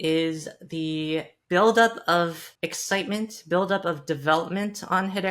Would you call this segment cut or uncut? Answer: cut